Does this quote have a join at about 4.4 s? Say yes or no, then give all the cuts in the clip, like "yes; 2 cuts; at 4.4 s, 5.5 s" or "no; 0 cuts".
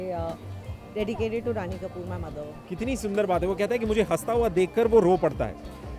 no; 1 cut; at 2.6 s